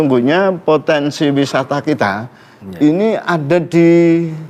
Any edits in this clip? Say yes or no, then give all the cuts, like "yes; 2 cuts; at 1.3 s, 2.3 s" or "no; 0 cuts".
no; 0 cuts